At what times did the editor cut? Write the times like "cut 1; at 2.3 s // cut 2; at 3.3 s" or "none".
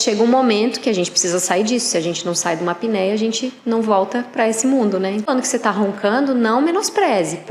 cut 1; at 5.3 s